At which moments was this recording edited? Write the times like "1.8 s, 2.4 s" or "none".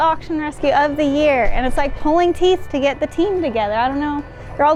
none